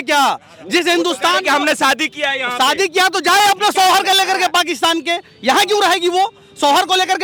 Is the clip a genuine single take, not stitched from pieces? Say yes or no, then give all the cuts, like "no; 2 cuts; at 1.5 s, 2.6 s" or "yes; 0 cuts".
yes; 0 cuts